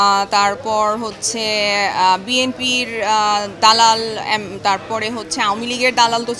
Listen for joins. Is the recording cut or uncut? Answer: uncut